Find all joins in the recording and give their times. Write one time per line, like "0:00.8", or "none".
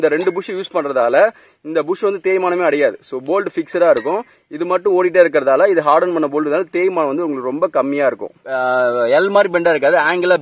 0:08.3